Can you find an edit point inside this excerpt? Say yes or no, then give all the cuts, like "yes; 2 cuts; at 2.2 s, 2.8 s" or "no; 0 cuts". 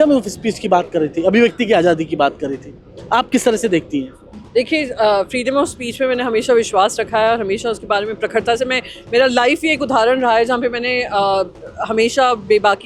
no; 0 cuts